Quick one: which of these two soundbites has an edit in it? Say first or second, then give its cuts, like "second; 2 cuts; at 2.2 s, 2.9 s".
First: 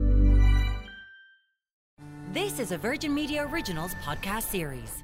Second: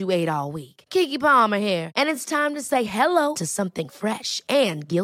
first; 1 cut; at 1.8 s